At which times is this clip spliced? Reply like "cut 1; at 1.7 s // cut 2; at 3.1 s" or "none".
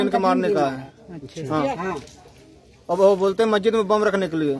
none